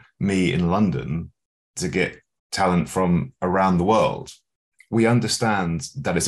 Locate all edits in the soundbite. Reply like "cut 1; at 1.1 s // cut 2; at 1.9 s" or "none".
cut 1; at 4.7 s